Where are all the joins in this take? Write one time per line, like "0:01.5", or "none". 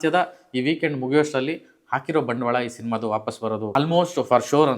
0:03.8